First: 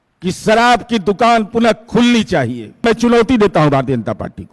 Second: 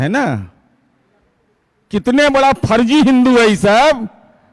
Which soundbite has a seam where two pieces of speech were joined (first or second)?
first